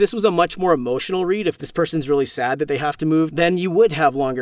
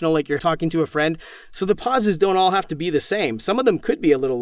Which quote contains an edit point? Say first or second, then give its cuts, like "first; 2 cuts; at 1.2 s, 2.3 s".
first; 1 cut; at 3.3 s